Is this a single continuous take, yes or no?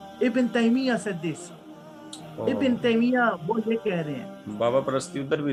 yes